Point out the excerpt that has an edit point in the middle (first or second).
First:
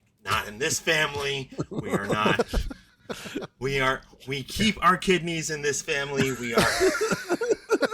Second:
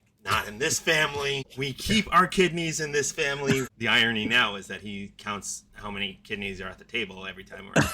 second